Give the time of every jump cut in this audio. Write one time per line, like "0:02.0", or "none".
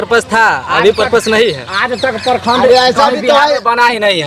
none